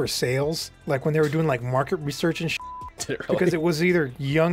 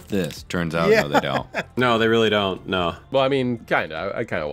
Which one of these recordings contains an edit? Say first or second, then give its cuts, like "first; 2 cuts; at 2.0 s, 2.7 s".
second; 1 cut; at 3.0 s